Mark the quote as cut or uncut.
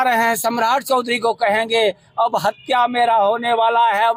uncut